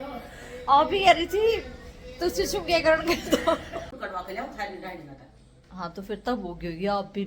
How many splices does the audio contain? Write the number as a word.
one